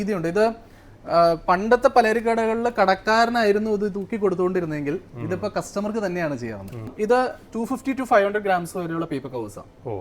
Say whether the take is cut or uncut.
cut